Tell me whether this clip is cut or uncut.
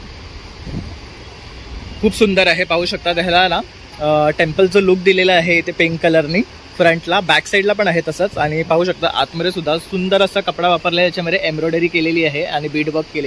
uncut